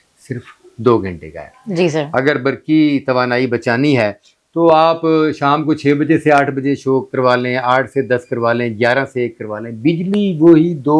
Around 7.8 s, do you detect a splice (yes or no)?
no